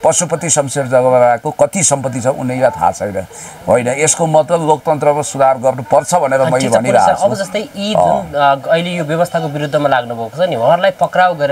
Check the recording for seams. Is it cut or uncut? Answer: uncut